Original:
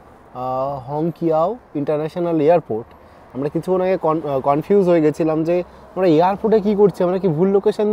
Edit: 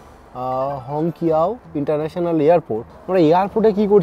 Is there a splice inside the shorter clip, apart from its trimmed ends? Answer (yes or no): yes